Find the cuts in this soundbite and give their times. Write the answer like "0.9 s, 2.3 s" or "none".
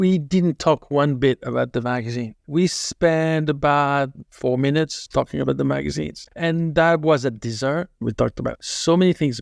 8.0 s